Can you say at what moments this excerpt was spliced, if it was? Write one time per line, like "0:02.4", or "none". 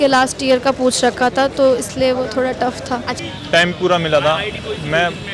0:03.1

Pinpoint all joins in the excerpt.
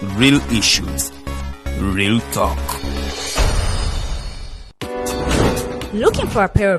0:04.3

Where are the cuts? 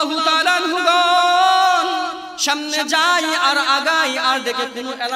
0:02.3

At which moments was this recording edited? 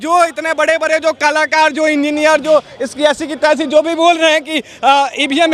none

